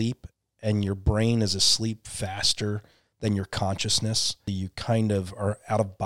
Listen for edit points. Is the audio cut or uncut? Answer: cut